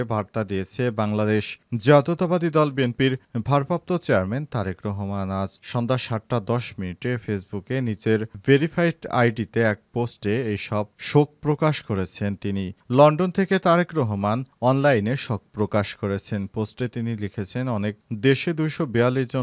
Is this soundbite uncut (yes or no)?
yes